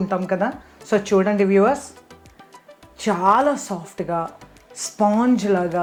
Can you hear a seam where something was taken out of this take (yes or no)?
no